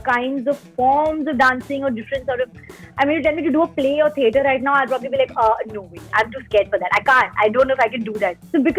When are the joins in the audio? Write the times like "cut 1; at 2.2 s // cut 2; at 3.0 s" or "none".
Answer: none